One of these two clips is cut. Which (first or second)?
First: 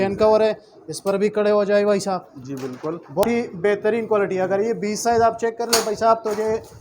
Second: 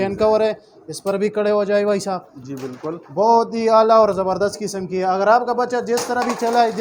first